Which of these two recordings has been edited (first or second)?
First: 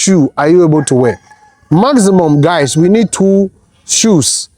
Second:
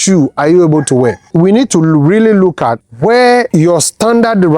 second